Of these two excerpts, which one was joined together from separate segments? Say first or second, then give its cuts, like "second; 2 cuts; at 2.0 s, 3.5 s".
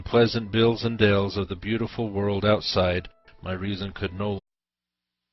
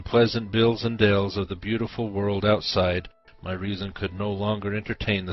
second; 1 cut; at 4.4 s